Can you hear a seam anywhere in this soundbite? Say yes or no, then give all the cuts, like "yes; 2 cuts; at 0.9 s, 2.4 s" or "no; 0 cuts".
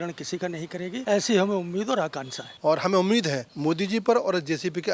yes; 3 cuts; at 1.0 s, 2.4 s, 3.5 s